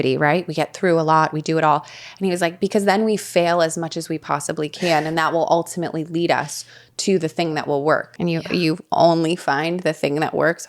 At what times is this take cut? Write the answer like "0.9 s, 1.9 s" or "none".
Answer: 8.1 s